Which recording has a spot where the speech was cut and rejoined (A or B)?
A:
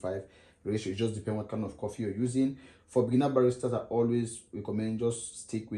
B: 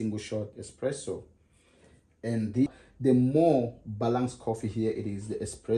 B